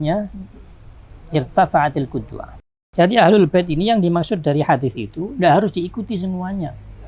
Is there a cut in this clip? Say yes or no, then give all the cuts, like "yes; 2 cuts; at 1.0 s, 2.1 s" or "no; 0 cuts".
yes; 1 cut; at 2.6 s